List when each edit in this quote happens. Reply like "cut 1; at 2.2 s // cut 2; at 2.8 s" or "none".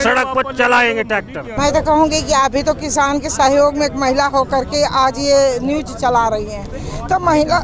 cut 1; at 1.5 s